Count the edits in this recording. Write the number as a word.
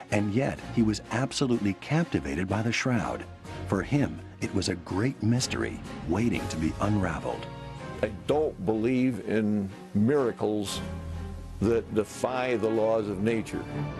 zero